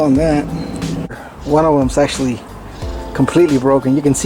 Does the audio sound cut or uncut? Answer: cut